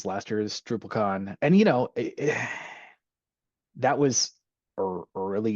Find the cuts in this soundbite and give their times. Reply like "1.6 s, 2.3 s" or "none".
1.3 s